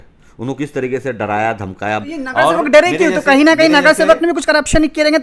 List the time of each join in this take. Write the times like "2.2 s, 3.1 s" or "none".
2.0 s